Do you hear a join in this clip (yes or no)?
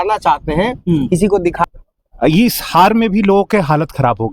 yes